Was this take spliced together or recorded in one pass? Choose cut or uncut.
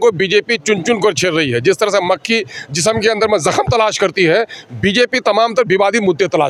uncut